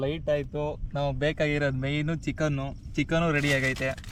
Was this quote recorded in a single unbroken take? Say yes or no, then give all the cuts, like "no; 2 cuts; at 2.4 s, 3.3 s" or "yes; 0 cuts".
yes; 0 cuts